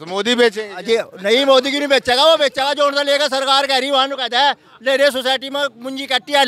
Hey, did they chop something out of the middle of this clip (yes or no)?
no